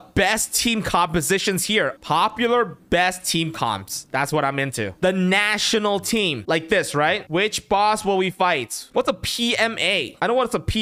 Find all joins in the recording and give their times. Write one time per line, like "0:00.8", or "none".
0:01.9
0:06.4
0:07.2
0:08.8